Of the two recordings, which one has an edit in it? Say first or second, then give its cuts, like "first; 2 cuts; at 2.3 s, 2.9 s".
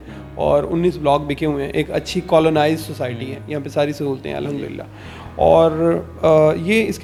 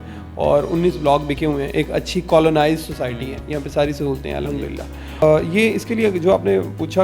second; 1 cut; at 5.2 s